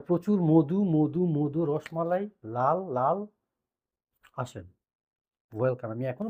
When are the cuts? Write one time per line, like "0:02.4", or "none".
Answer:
none